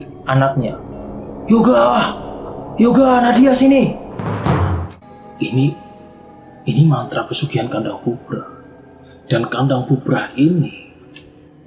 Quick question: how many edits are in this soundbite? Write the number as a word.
one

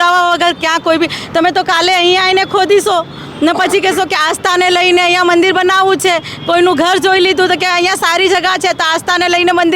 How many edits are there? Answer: zero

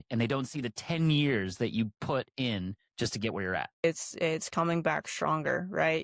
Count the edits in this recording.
one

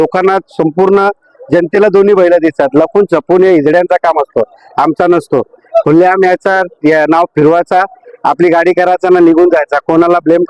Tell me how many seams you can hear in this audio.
zero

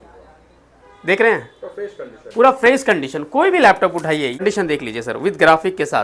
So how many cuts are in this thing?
one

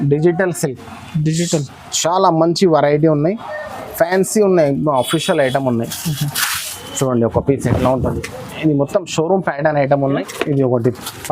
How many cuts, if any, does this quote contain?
one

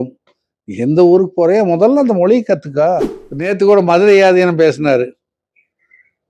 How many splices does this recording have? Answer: one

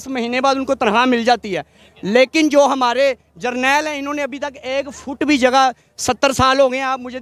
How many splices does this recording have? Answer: zero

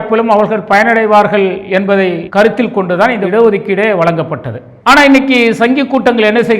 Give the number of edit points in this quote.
one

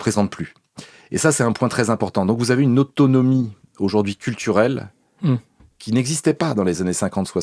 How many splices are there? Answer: zero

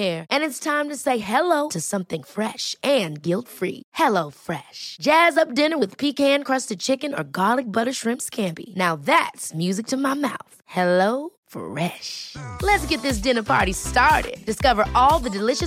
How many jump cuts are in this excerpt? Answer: zero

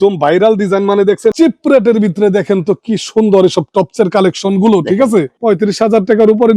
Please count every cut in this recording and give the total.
two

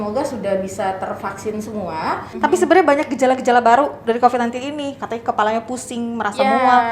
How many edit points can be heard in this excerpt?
one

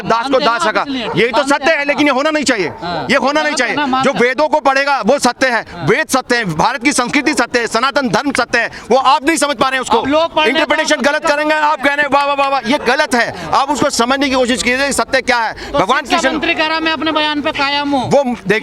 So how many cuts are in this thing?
zero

